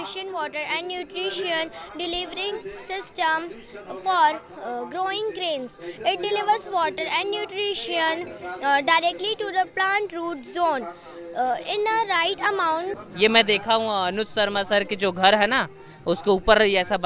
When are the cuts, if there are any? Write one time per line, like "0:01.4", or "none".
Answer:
0:13.0